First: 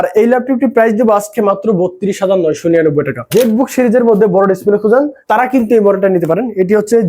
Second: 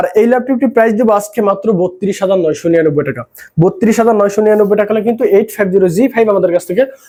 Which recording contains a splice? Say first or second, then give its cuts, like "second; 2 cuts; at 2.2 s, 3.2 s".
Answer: first; 2 cuts; at 3.2 s, 5.2 s